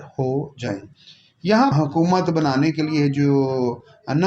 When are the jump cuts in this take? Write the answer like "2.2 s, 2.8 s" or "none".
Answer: 1.7 s